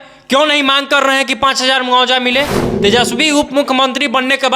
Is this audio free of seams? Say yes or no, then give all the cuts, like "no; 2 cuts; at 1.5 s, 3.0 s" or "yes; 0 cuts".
no; 1 cut; at 2.6 s